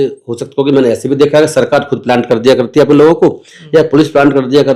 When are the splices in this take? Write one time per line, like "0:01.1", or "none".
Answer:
none